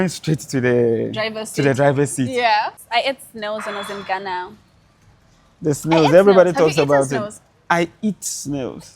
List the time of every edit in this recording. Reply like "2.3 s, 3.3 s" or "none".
2.7 s